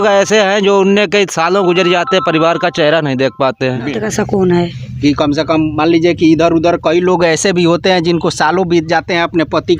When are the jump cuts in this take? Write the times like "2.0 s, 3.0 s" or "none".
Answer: 4.0 s